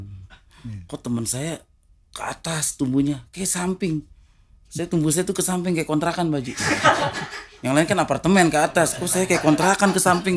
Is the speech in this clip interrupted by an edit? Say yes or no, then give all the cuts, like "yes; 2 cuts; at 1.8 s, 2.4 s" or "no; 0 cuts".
no; 0 cuts